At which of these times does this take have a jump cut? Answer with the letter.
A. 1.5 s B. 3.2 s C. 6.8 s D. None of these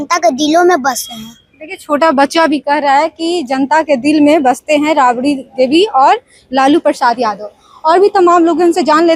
D